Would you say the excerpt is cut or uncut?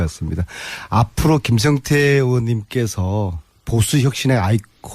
cut